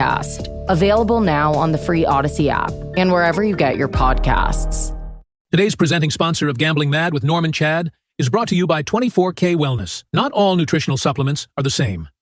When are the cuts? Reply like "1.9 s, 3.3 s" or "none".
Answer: 5.4 s